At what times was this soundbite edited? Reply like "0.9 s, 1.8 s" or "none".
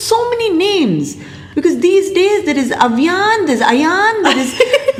none